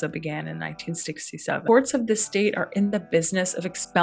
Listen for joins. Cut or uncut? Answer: cut